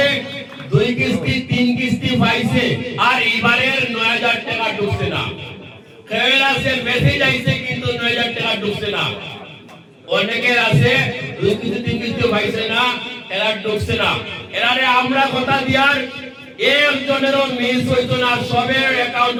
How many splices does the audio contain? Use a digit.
0